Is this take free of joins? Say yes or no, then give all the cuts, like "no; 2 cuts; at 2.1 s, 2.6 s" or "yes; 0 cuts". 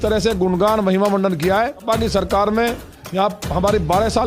no; 1 cut; at 1.8 s